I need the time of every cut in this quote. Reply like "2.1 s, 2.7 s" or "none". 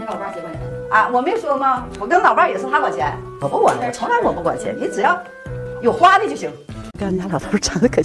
6.9 s